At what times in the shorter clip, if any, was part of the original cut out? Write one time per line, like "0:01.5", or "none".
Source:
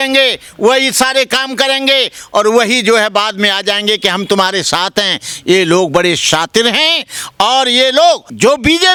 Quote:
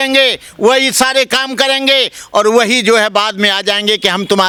none